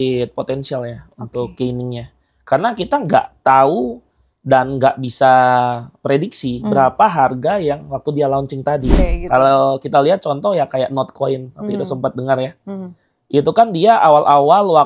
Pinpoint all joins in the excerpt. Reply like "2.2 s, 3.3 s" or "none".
9.0 s